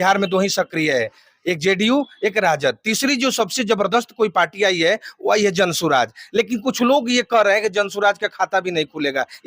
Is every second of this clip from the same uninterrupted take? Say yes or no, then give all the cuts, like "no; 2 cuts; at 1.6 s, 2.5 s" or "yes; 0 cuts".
yes; 0 cuts